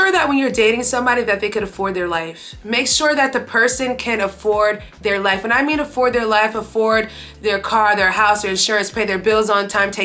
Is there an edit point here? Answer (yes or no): no